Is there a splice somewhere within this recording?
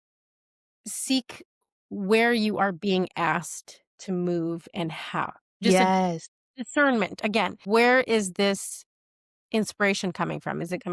yes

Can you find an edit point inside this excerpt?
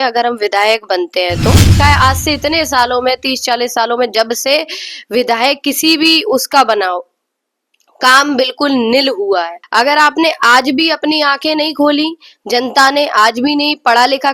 yes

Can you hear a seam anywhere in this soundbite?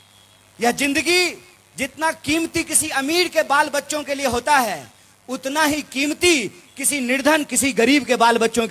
no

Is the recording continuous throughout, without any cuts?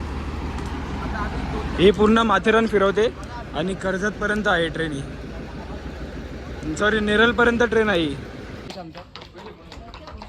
no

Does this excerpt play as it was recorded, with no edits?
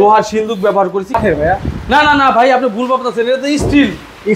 no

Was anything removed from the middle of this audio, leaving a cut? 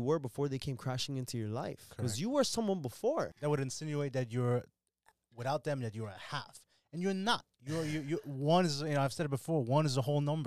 yes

